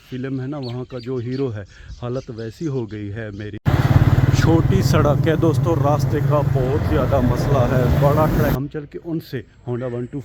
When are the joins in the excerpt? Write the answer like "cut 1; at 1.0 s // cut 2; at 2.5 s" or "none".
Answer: cut 1; at 3.6 s // cut 2; at 8.5 s